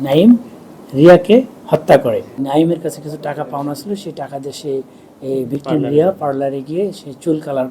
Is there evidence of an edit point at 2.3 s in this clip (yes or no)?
yes